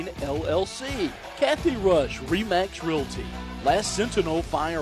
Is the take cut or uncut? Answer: cut